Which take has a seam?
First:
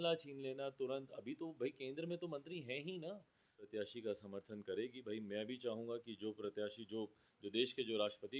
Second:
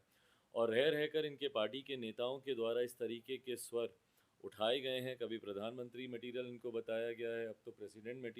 first; 1 cut; at 3.7 s

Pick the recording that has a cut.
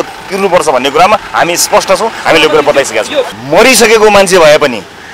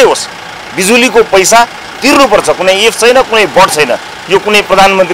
first; 1 cut; at 3.4 s

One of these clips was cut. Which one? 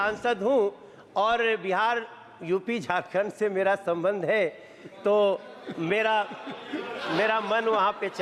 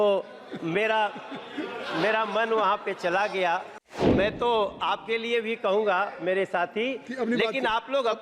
second; 1 cut; at 4.1 s

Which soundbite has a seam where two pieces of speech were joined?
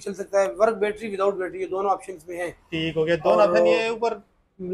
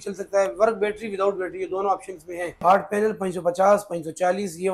second; 1 cut; at 2.6 s

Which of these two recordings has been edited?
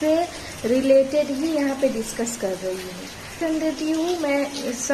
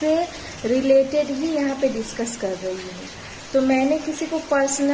first; 1 cut; at 3.3 s

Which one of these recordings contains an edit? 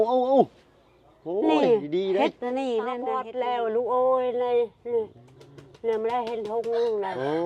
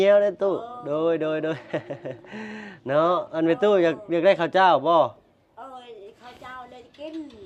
first; 1 cut; at 3.2 s

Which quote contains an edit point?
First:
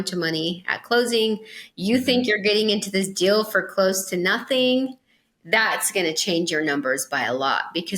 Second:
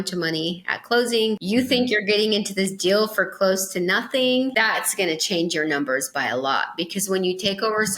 second; 2 cuts; at 1.4 s, 4.5 s

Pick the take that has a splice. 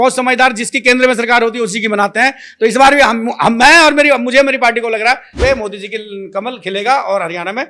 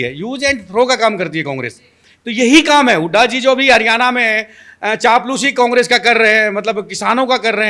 first; 1 cut; at 5.4 s

